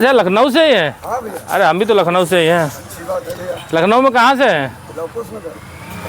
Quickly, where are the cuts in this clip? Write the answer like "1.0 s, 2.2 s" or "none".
none